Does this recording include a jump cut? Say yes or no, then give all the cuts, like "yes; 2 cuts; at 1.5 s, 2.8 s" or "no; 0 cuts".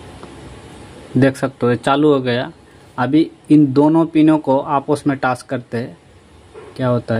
no; 0 cuts